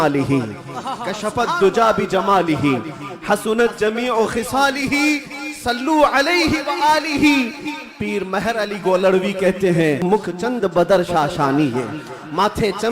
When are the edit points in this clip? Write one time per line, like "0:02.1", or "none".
0:10.0

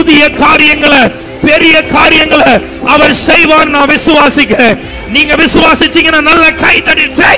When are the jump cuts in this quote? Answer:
none

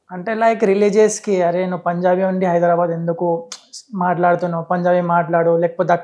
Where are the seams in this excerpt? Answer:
none

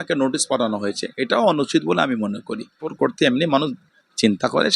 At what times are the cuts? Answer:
0:02.9

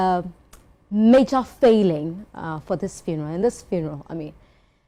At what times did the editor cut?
none

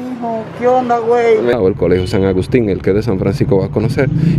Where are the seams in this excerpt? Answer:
0:01.5

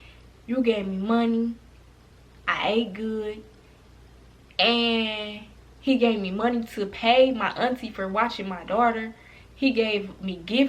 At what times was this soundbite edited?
none

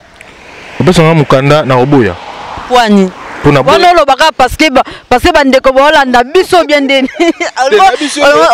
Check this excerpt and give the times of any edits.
none

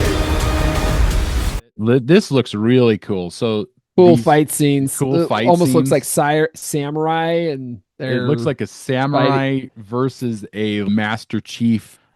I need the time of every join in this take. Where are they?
0:10.9

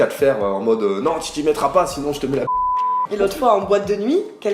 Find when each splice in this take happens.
0:03.1

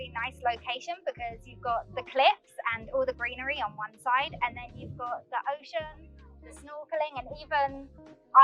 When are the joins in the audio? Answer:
none

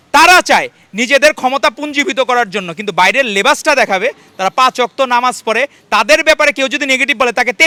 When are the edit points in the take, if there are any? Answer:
none

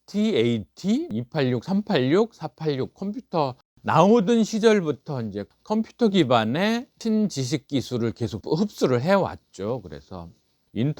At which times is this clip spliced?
0:03.7

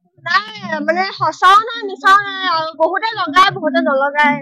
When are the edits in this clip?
none

